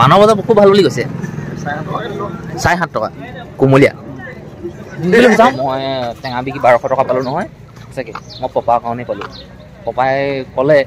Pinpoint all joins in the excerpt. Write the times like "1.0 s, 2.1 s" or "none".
5.5 s